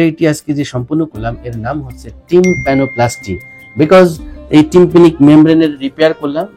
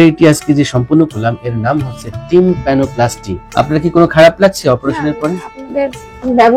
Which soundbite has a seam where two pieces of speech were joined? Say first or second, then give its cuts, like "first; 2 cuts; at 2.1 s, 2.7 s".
second; 1 cut; at 3.4 s